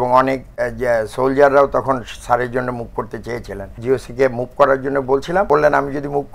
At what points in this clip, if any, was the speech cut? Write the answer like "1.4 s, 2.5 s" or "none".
3.7 s, 5.5 s